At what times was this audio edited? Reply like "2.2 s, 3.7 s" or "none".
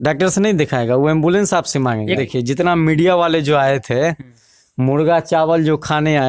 2.2 s